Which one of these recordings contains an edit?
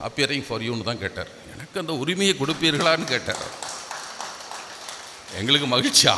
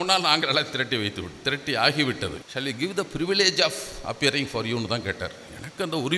second; 1 cut; at 2.4 s

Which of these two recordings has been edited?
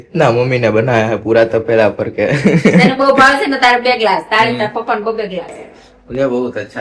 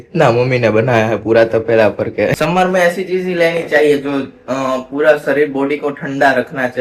second; 1 cut; at 2.4 s

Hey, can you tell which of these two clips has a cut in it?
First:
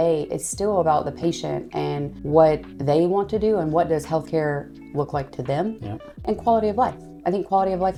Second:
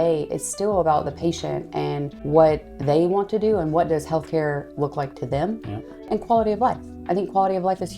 second; 1 cut; at 4.7 s

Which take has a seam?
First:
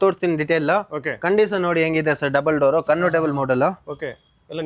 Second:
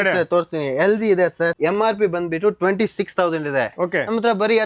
second; 1 cut; at 1.6 s

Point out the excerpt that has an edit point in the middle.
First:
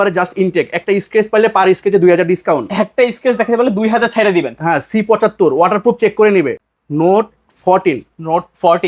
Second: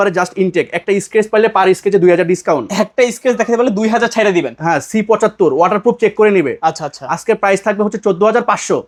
first; 1 cut; at 6.5 s

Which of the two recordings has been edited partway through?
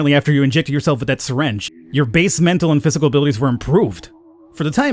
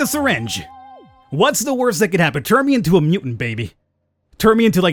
first; 1 cut; at 1.6 s

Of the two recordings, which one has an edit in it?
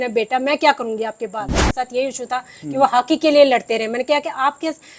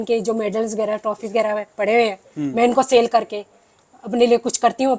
first; 1 cut; at 1.7 s

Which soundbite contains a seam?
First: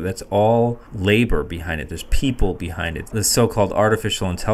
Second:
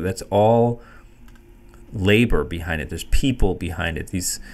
first; 2 cuts; at 0.9 s, 3.1 s

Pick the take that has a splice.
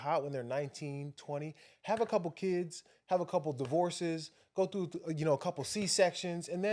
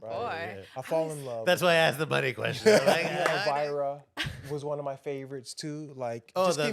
second; 1 cut; at 3.4 s

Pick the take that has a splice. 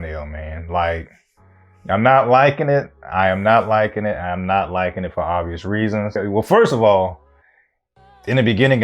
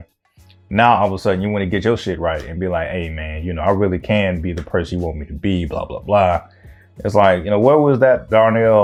first; 1 cut; at 6.2 s

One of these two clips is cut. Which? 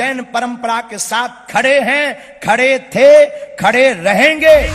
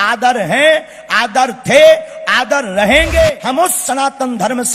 second; 1 cut; at 3.4 s

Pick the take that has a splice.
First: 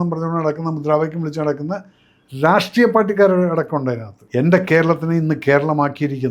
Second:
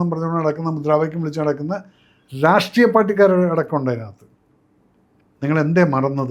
first; 1 cut; at 4.1 s

